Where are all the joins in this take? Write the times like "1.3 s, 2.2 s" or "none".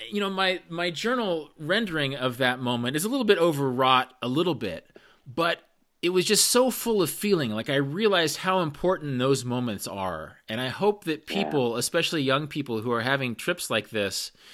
none